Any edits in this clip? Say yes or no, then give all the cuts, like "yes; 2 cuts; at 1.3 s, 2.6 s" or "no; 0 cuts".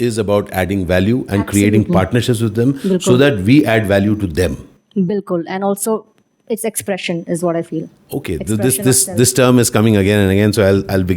no; 0 cuts